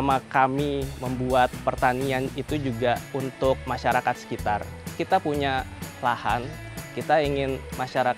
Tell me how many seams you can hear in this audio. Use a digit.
4